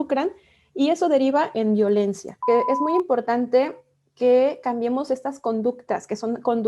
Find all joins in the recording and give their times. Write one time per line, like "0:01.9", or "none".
0:02.4